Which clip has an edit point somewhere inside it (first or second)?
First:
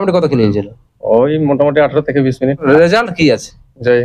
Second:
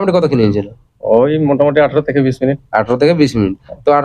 first